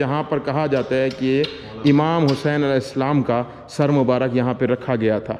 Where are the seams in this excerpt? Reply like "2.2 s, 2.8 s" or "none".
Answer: none